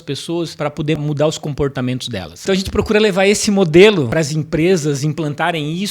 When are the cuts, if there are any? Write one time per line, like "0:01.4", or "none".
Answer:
0:00.9
0:02.4
0:04.1

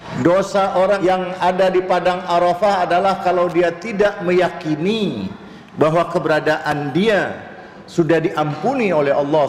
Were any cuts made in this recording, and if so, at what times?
0:01.0

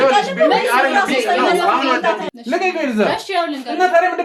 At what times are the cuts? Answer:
0:02.3

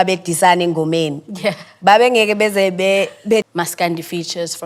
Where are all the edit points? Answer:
0:03.4

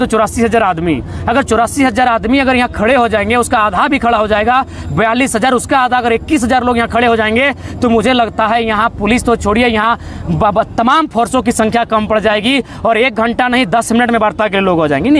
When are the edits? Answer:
none

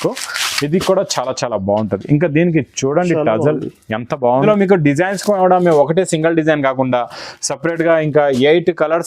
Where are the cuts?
0:04.4

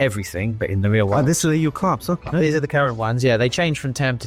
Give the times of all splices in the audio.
none

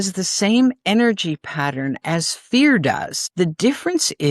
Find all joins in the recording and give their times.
0:03.2

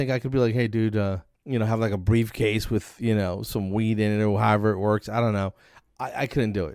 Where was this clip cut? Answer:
0:01.3

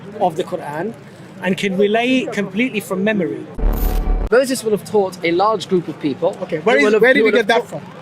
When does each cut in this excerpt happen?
0:03.7

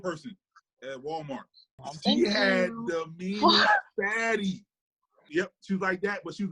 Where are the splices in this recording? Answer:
0:01.8
0:05.2

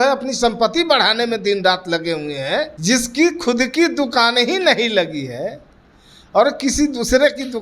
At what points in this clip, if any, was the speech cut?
0:02.7

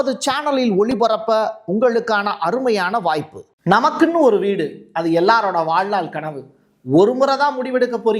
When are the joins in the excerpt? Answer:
0:03.4

